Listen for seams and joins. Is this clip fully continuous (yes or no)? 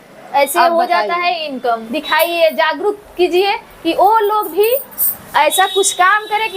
no